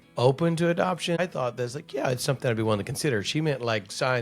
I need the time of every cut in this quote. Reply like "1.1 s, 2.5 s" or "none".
1.2 s